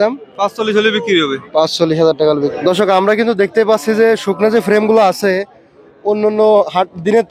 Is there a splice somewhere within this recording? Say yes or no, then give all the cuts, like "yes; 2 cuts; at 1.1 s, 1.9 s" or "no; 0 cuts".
yes; 1 cut; at 2.5 s